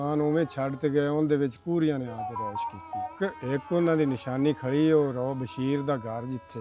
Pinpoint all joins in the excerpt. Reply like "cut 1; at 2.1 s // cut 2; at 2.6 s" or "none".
cut 1; at 3.2 s